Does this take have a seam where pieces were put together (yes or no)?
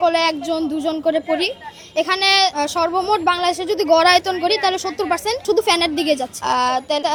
no